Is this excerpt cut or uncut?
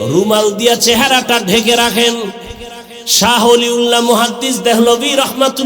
cut